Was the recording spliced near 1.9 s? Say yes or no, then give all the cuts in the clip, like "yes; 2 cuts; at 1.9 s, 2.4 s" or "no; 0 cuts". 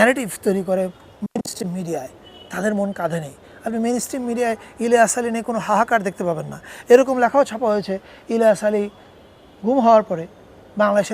no; 0 cuts